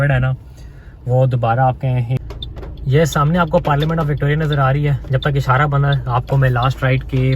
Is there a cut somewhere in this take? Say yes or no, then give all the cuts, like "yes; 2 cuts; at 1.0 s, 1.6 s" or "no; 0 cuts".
yes; 1 cut; at 2.2 s